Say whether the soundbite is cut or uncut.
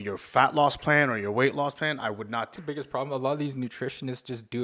cut